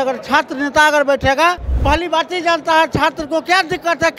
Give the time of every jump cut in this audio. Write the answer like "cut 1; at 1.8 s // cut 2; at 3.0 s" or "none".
cut 1; at 1.7 s